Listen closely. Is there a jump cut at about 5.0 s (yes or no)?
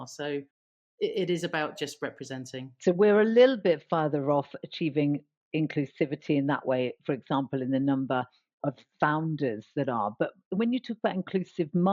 no